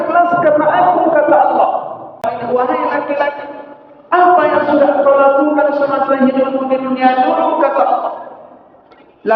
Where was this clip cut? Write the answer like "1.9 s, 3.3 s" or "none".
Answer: 2.3 s